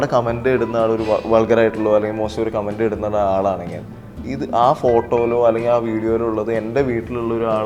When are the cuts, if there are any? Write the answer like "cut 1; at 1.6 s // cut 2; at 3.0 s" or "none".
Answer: none